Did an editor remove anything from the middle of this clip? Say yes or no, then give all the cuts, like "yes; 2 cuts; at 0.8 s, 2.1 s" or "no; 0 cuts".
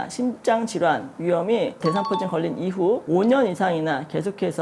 no; 0 cuts